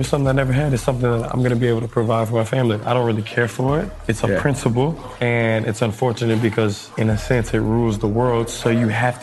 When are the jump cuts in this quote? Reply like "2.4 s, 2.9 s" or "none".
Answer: 5.1 s, 6.8 s